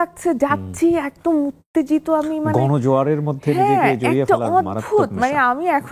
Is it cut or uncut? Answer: uncut